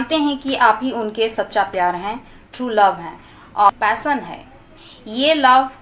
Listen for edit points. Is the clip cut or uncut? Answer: cut